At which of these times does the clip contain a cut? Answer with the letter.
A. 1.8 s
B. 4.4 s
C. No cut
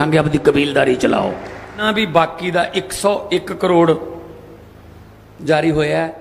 A